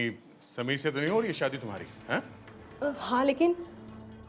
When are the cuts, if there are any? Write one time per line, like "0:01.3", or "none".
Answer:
0:02.5